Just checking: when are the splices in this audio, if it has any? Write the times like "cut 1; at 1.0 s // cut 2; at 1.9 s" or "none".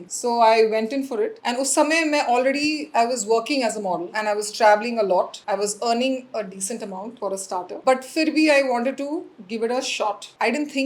none

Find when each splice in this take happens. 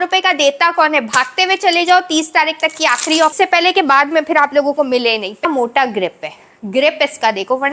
cut 1; at 3.3 s // cut 2; at 5.4 s

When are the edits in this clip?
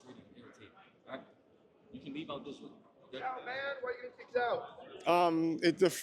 none

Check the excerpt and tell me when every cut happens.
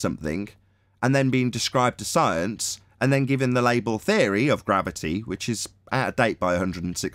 none

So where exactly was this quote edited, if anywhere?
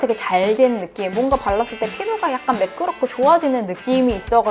none

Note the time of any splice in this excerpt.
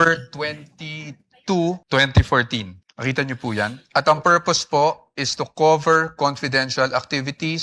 cut 1; at 1.8 s // cut 2; at 2.8 s // cut 3; at 3.8 s

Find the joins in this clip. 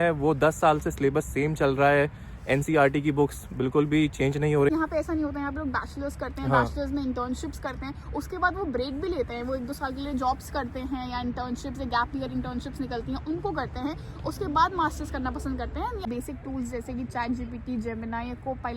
cut 1; at 4.7 s // cut 2; at 16.0 s

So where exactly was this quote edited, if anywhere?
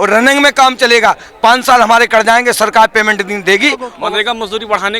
cut 1; at 3.9 s

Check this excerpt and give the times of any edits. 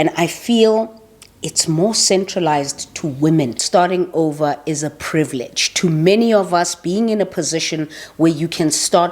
cut 1; at 3.6 s

